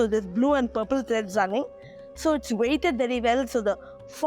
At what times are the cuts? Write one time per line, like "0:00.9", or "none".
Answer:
0:02.0